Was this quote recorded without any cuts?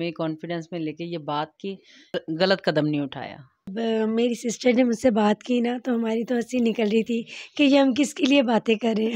no; 2 cuts; at 2.4 s, 3.6 s

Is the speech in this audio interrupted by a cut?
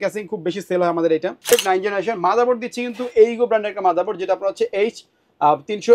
yes; 1 cut; at 1.5 s

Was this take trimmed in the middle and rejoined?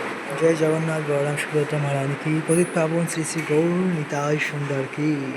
no; 0 cuts

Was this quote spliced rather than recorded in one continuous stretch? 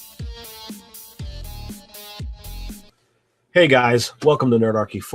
yes; 1 cut; at 2.7 s

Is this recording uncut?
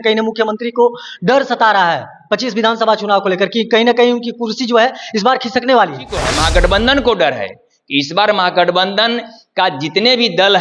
no; 1 cut; at 6.3 s

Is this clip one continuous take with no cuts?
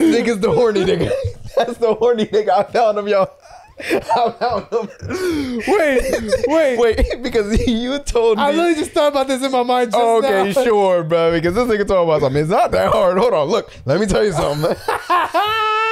yes; 0 cuts

